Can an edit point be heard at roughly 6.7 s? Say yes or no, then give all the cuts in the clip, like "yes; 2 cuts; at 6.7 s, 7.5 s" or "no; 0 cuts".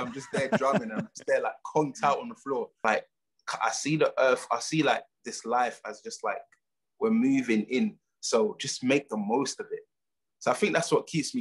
no; 1 cut; at 2.7 s